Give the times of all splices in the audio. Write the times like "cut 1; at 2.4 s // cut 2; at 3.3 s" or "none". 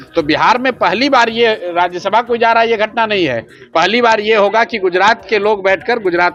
none